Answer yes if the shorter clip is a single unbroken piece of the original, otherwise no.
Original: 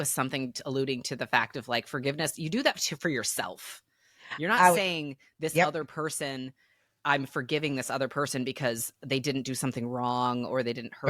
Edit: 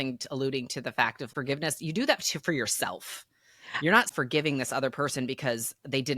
no